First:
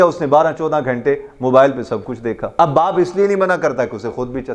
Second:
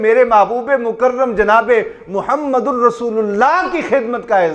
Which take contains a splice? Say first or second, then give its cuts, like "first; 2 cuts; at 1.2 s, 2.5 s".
first; 1 cut; at 2.4 s